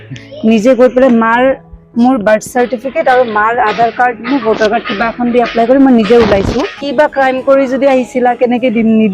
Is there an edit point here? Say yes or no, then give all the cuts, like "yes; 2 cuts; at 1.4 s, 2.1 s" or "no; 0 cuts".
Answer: yes; 1 cut; at 6.8 s